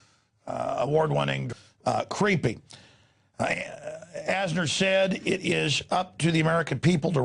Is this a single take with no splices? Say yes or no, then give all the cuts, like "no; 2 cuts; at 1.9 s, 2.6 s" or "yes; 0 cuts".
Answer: yes; 0 cuts